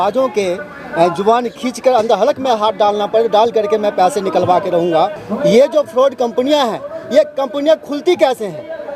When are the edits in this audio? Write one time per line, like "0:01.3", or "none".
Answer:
0:05.2